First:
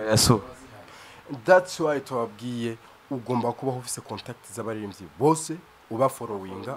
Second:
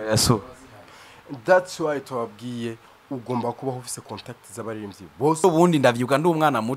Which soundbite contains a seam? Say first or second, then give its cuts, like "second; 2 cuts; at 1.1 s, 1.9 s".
second; 1 cut; at 5.4 s